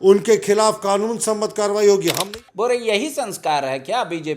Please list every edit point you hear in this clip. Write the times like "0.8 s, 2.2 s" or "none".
2.2 s